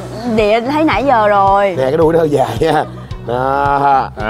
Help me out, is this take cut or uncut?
uncut